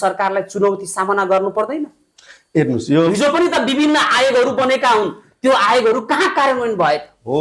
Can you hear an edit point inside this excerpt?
no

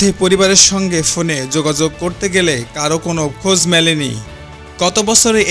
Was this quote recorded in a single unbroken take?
yes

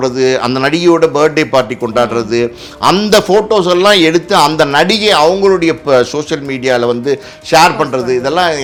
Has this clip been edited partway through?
no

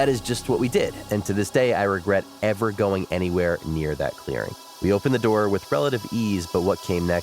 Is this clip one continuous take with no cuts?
no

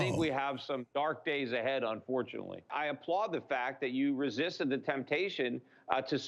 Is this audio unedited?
no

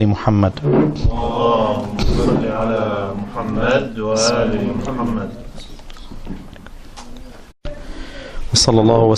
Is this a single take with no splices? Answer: yes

